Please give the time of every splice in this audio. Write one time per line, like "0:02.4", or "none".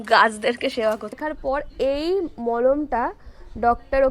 0:01.2

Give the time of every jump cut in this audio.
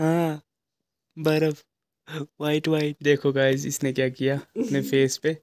0:03.0

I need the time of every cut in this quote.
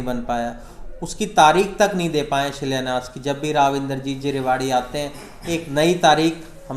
none

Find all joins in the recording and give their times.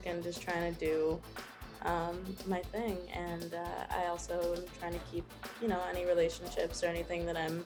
none

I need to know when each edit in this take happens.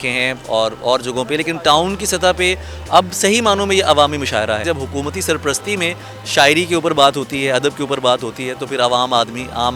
0:04.6

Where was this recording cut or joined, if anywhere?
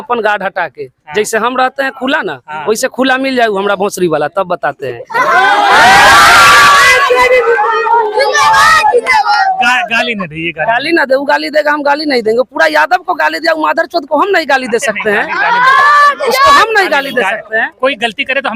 none

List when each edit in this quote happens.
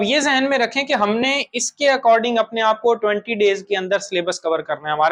none

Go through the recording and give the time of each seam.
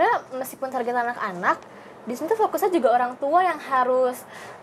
none

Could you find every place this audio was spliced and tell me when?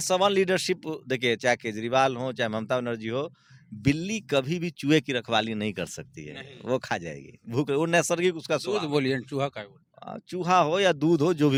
none

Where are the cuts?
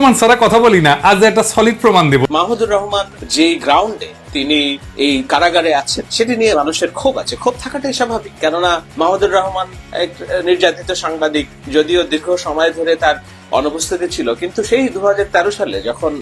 0:02.2
0:03.2
0:04.8
0:08.9
0:11.6

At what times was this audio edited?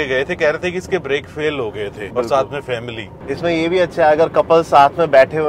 0:02.0
0:03.1

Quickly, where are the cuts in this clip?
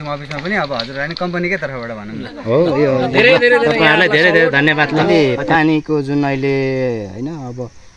0:05.0

